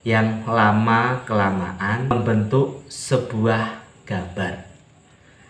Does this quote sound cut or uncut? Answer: cut